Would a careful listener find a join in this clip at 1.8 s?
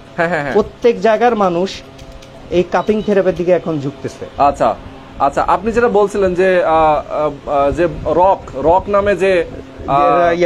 no; 0 cuts

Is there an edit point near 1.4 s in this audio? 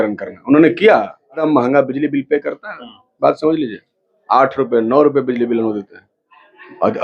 yes; 1 cut; at 1.4 s

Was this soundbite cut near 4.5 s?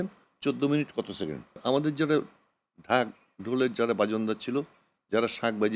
no; 1 cut; at 1.6 s

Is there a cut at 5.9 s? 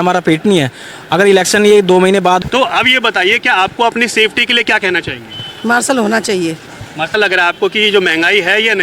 no; 2 cuts; at 2.4 s, 7.1 s

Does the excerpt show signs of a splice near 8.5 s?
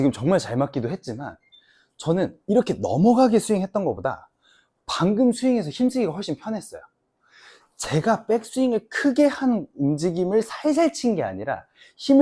no; 0 cuts

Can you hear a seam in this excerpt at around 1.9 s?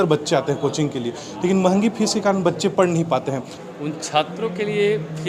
no; 1 cut; at 3.5 s

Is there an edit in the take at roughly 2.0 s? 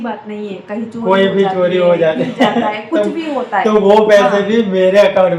no; 0 cuts

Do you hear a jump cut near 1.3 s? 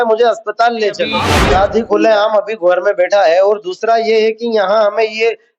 yes; 1 cut; at 1.3 s

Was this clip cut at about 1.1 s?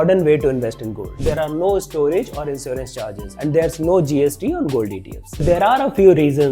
yes; 3 cuts; at 1.1 s, 3.4 s, 5.4 s

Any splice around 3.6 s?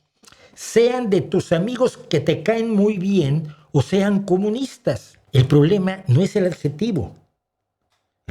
no; 1 cut; at 5.1 s

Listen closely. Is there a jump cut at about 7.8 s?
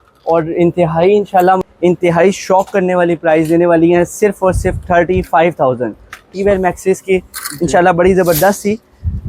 no; 2 cuts; at 1.6 s, 6.3 s

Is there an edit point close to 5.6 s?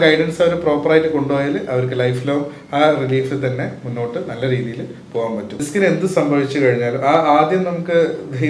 yes; 1 cut; at 5.6 s

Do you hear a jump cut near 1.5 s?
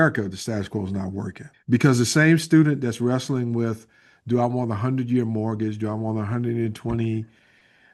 yes; 1 cut; at 1.5 s

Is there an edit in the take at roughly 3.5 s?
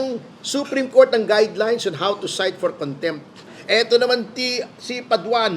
yes; 1 cut; at 3.5 s

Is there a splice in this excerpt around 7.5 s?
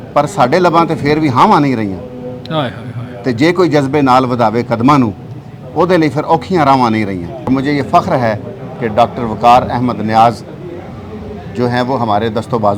yes; 1 cut; at 7.5 s

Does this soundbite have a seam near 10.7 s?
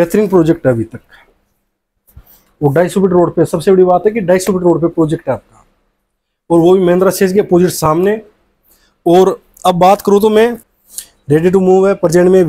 yes; 1 cut; at 10.7 s

